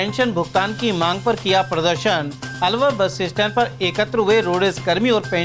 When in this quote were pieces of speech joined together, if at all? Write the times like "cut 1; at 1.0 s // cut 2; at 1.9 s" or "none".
none